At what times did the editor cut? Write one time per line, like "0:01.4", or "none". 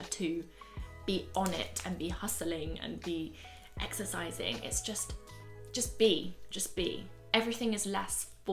0:07.1